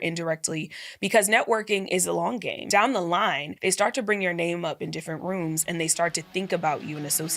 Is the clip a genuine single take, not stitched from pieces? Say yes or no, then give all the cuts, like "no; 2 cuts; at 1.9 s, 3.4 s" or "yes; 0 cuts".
no; 2 cuts; at 2.6 s, 3.5 s